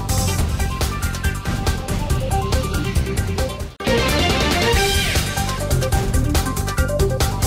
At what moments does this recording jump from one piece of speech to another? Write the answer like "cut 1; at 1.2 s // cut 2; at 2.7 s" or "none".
none